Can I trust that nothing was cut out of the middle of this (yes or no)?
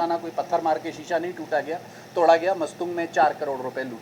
yes